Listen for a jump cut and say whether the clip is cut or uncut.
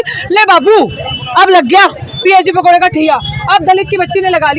uncut